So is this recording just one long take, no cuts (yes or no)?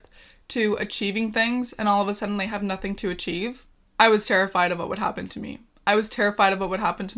yes